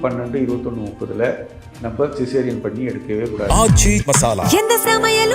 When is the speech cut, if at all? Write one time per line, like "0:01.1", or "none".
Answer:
0:03.5